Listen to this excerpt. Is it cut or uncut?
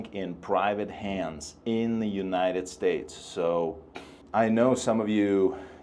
uncut